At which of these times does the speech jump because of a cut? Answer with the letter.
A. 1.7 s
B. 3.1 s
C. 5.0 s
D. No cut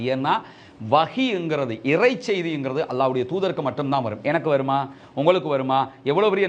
D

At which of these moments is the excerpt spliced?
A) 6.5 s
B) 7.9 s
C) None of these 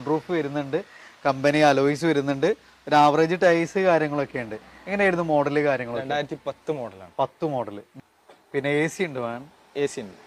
B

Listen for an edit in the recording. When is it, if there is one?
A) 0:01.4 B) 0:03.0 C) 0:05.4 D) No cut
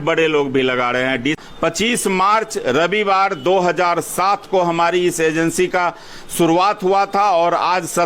A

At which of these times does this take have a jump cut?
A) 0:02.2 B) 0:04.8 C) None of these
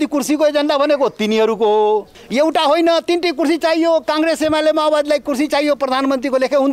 A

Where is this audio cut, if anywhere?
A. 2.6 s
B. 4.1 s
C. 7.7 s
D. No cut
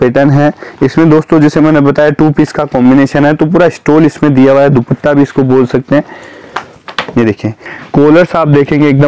C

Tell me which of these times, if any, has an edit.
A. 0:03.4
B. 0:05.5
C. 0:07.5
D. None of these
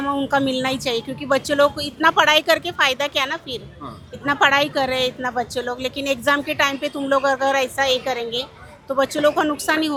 D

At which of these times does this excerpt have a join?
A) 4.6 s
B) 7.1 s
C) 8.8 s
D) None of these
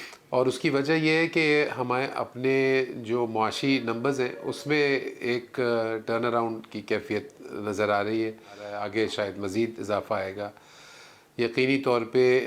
C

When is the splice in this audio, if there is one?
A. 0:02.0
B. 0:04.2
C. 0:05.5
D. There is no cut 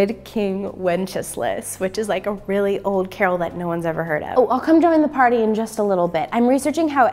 B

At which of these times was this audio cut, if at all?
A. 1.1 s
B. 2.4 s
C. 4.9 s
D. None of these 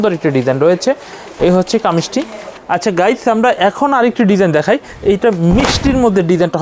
B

